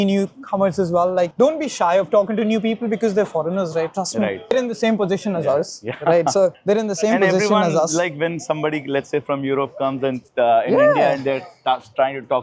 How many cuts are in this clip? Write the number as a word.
zero